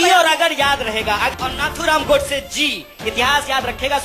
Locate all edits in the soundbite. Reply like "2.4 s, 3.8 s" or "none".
1.3 s